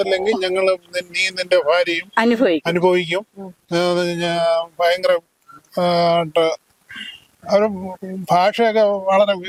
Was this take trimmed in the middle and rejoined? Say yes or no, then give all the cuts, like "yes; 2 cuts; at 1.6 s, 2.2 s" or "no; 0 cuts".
no; 0 cuts